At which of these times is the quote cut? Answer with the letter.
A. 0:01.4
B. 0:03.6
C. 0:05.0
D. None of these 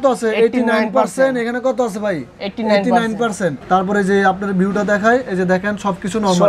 B